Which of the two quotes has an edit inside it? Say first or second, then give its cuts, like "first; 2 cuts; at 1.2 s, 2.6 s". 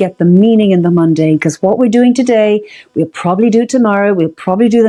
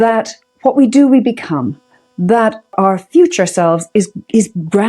second; 1 cut; at 2.7 s